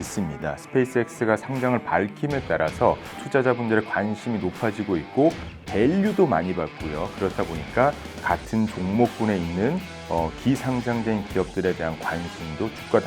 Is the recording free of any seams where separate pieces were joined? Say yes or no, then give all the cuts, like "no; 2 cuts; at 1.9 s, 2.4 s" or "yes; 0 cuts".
yes; 0 cuts